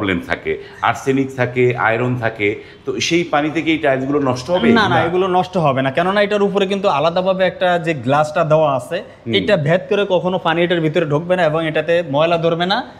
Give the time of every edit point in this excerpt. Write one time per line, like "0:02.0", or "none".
none